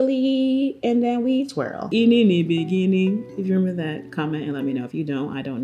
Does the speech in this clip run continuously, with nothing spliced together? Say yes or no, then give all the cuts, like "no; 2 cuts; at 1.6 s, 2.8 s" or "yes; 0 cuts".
no; 1 cut; at 1.9 s